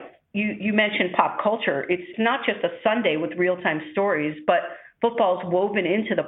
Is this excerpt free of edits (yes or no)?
no